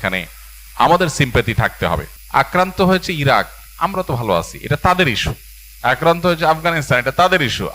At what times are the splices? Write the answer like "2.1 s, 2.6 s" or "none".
2.1 s